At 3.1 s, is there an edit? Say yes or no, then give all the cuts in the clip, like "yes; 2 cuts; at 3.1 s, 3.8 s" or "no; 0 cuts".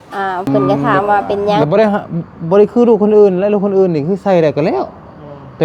no; 1 cut; at 1.6 s